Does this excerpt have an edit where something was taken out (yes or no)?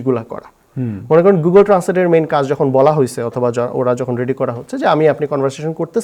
no